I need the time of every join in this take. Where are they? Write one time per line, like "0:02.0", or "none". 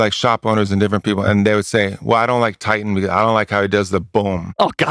none